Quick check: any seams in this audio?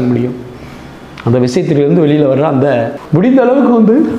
yes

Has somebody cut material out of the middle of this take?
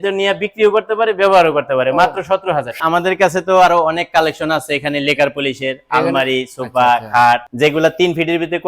yes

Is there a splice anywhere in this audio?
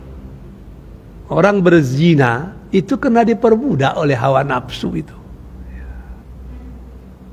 no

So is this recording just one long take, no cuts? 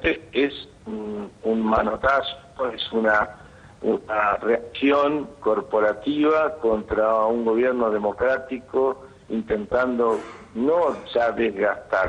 yes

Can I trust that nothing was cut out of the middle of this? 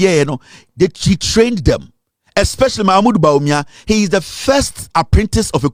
yes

